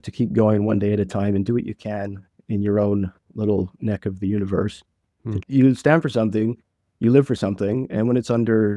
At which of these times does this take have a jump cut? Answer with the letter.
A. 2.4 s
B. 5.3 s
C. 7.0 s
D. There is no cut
B